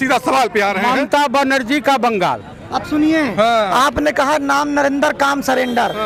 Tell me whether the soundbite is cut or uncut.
uncut